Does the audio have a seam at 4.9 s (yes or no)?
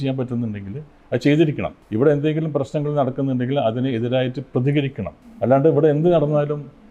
no